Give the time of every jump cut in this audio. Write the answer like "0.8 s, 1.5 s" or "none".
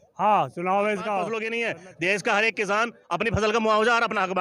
1.4 s